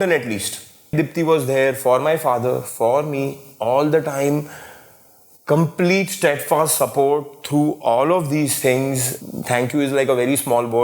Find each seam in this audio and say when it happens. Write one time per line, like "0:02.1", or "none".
0:00.9
0:09.1